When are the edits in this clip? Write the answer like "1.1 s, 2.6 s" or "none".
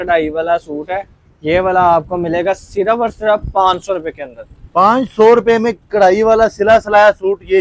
none